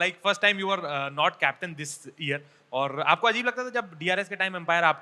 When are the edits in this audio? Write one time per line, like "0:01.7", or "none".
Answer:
none